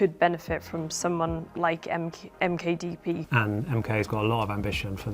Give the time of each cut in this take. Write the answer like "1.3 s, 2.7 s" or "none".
3.2 s